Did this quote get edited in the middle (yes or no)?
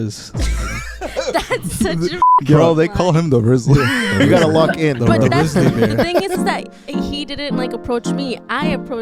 no